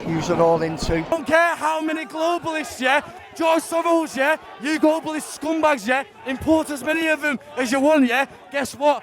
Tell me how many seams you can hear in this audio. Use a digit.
1